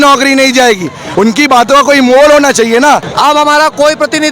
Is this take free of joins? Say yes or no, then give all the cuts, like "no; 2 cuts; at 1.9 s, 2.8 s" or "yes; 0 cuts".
no; 2 cuts; at 1.0 s, 3.1 s